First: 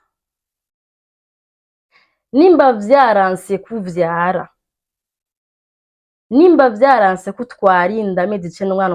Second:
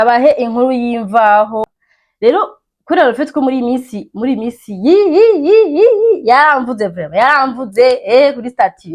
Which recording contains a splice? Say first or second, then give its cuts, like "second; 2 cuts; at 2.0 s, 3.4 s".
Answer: second; 1 cut; at 1.8 s